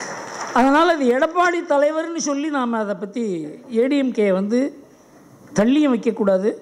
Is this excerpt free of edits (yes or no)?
yes